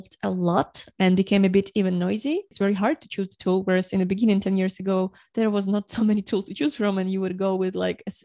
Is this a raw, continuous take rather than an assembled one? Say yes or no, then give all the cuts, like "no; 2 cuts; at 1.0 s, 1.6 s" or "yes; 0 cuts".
no; 1 cut; at 2.5 s